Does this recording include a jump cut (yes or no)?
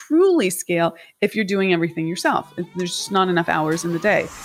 no